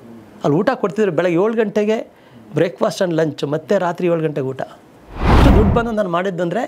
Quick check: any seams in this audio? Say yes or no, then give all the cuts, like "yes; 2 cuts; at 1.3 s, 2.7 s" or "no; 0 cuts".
yes; 1 cut; at 5.4 s